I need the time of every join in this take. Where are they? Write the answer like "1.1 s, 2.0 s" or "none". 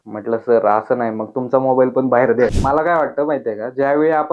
2.6 s